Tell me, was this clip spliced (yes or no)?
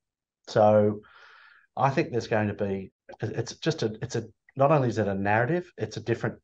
yes